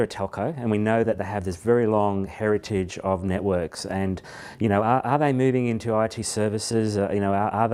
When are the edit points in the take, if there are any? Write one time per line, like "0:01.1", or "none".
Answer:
none

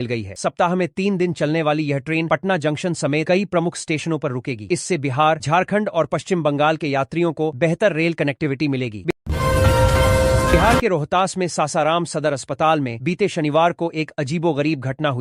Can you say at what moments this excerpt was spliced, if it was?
0:09.1
0:10.6

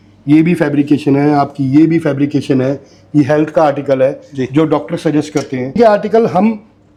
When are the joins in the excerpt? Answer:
none

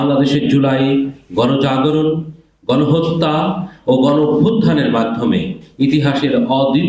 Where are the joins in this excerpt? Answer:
none

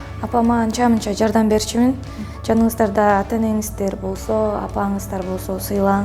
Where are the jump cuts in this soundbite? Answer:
0:02.3

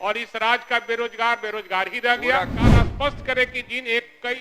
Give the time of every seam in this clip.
0:02.6

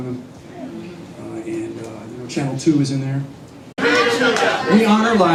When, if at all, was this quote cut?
none

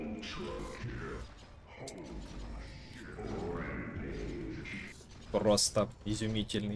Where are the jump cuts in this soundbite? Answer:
0:01.2

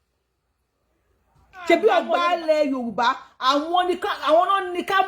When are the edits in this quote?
0:02.1

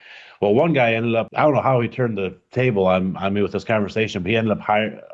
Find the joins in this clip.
0:01.3

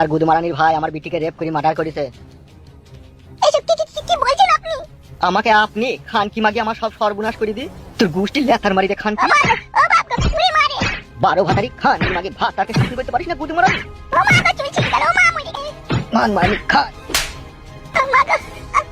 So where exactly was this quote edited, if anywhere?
0:15.5

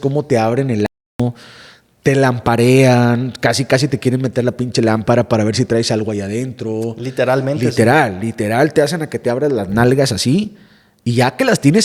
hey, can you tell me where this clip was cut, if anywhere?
none

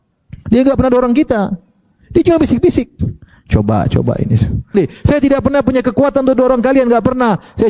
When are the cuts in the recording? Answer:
0:04.7

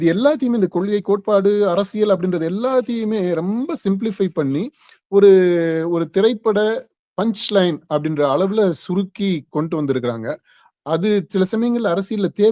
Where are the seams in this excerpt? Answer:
none

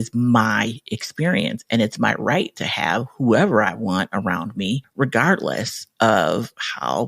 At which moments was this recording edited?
0:04.9

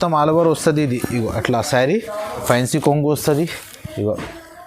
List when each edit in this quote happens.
0:02.4

